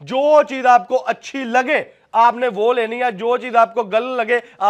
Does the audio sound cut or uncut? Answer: uncut